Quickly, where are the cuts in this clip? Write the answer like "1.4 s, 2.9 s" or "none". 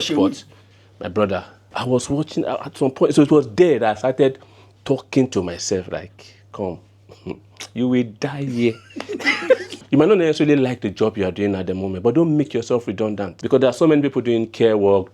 1.7 s, 9.7 s, 13.3 s

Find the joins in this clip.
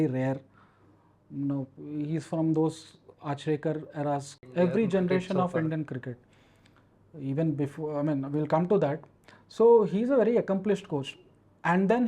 4.4 s

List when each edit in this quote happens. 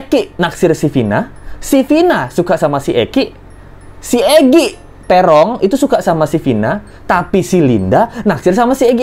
none

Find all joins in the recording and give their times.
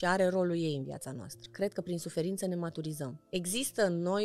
1.5 s, 3.2 s

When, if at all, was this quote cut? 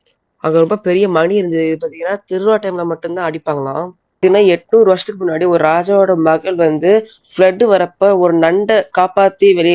4.1 s

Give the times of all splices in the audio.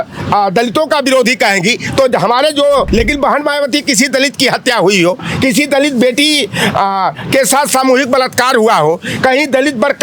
2.9 s

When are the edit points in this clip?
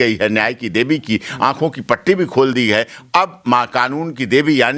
none

